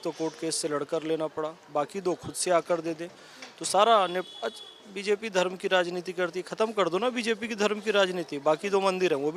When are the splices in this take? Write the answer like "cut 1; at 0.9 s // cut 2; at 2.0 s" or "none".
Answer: none